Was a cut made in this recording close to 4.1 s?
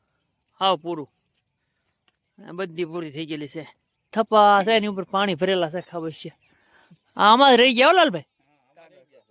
yes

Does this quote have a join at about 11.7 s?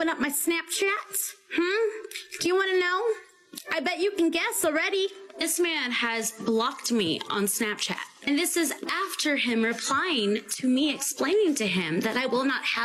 no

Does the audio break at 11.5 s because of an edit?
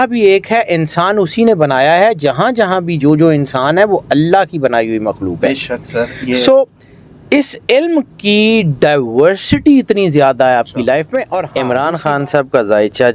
yes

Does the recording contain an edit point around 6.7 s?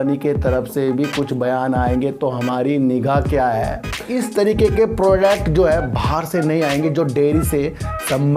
no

